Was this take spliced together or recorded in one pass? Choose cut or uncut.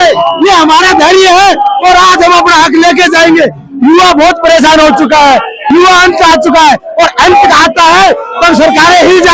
uncut